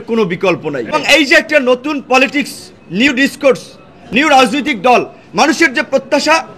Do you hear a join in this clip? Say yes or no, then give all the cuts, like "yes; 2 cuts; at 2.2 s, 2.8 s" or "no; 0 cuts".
yes; 1 cut; at 0.9 s